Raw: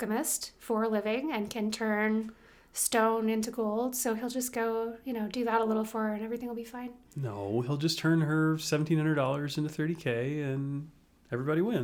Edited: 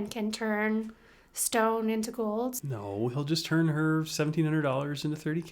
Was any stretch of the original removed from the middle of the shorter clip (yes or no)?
yes